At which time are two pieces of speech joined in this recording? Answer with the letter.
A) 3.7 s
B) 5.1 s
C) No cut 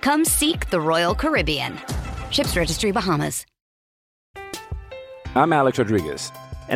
A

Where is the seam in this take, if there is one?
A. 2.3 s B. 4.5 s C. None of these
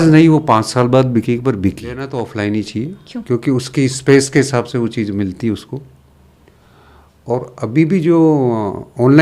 A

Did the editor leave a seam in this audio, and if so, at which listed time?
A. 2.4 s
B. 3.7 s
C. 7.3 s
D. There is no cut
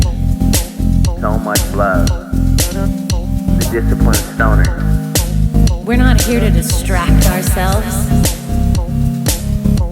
B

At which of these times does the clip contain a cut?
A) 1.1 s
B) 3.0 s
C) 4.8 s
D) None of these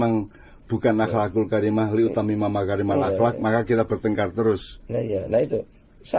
D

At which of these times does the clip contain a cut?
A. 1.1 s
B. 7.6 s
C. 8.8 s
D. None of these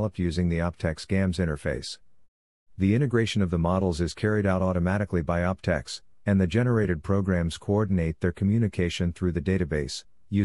D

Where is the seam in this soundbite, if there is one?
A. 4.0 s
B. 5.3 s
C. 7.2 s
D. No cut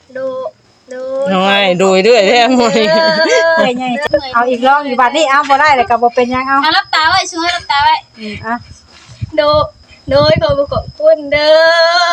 A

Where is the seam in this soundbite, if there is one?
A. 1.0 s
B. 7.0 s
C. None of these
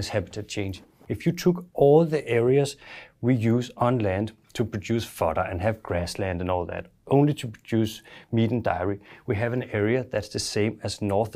A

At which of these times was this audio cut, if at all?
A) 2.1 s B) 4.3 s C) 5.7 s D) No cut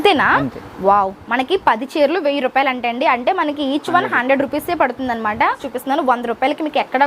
C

